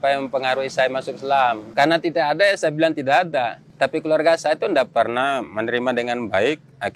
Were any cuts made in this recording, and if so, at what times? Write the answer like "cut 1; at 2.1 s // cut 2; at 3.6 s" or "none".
cut 1; at 1.6 s // cut 2; at 3.6 s